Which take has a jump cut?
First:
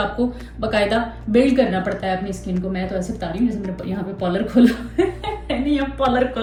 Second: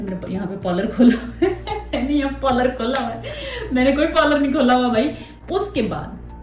second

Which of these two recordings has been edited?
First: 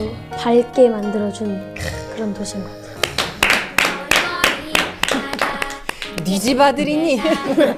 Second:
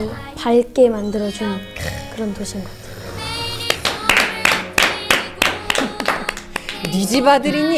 first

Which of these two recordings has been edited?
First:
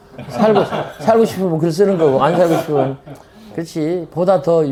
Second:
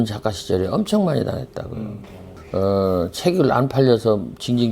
second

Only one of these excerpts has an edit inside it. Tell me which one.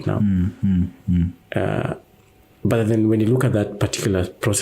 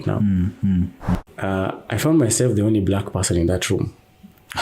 second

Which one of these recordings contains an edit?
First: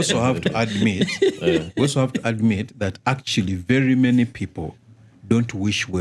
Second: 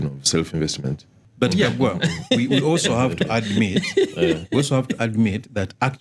second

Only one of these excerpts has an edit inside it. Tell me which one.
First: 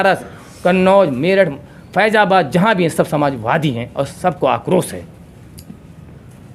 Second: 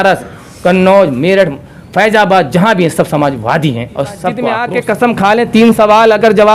second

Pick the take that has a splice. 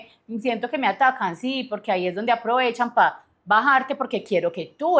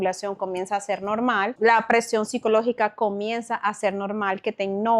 second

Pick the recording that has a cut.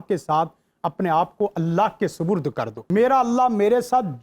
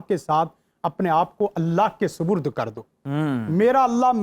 first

